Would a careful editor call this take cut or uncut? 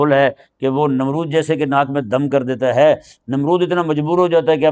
uncut